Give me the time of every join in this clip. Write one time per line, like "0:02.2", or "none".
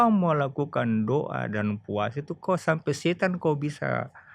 none